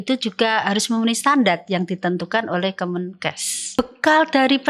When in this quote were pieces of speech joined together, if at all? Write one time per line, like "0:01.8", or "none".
0:03.6